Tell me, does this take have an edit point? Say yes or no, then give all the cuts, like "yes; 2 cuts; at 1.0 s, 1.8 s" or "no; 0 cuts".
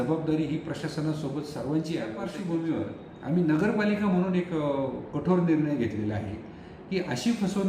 yes; 1 cut; at 2.3 s